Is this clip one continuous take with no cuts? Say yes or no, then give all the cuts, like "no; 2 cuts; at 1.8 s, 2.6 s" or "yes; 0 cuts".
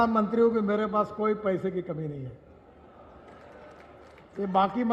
yes; 0 cuts